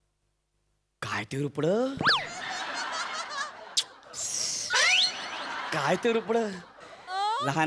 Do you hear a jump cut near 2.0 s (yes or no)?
no